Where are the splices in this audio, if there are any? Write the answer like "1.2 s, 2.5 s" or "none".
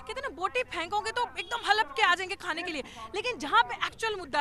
none